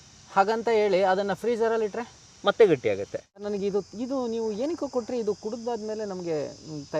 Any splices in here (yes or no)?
yes